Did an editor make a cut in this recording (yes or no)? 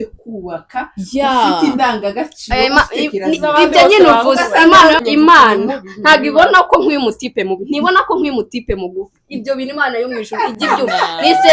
yes